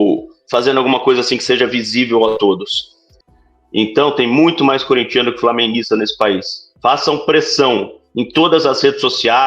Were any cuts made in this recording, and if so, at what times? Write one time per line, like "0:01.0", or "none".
0:03.1